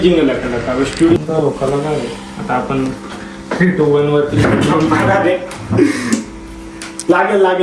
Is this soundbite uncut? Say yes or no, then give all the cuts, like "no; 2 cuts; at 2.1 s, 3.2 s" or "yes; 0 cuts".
no; 1 cut; at 1.2 s